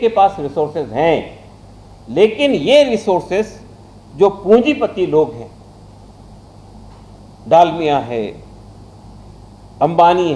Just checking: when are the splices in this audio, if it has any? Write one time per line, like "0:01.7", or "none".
none